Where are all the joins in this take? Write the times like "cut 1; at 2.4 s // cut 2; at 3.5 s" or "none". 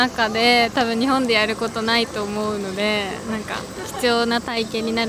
none